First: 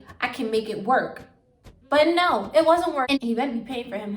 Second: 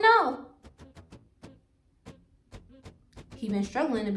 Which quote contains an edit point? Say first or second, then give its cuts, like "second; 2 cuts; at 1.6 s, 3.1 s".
first; 1 cut; at 3.0 s